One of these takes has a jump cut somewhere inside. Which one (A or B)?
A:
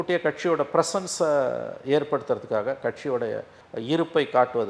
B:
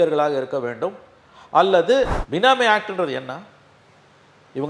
B